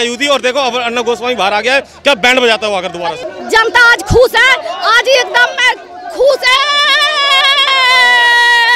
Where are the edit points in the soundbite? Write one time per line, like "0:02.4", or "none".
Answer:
0:03.3